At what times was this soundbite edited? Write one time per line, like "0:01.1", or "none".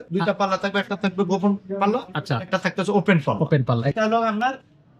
0:03.9